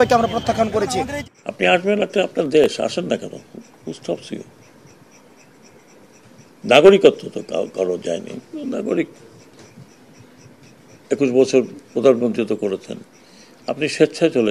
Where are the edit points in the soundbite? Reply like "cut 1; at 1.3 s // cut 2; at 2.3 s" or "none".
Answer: cut 1; at 1.2 s